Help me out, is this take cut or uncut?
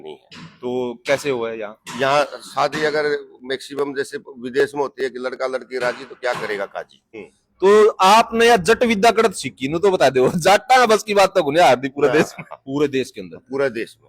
cut